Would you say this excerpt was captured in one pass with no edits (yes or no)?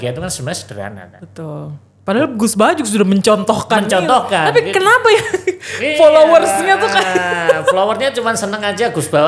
yes